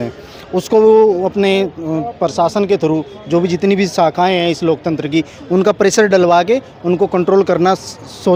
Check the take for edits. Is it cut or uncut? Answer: uncut